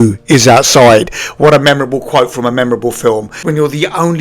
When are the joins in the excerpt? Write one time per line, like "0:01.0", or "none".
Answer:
0:03.3